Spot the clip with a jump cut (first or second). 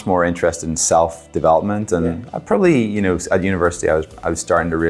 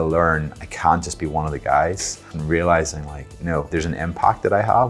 second